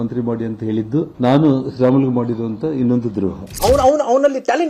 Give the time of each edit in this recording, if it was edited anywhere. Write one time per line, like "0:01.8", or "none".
0:01.1
0:03.4